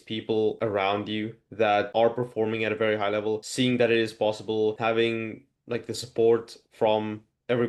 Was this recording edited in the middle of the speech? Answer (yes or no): no